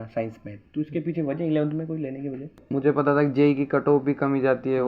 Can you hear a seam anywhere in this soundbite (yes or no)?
yes